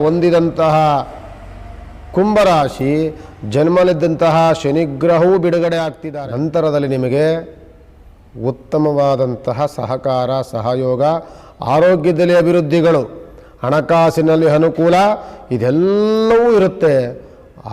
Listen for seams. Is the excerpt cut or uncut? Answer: cut